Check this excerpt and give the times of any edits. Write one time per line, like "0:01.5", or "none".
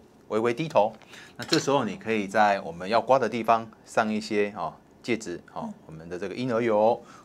none